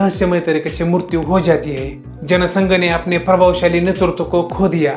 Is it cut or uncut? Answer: uncut